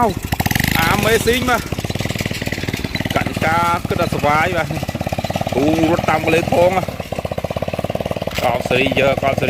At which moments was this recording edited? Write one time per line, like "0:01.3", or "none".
none